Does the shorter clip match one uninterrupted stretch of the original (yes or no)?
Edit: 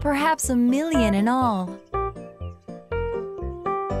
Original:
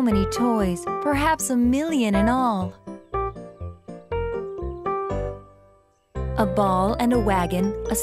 no